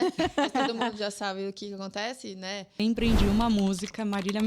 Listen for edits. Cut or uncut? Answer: cut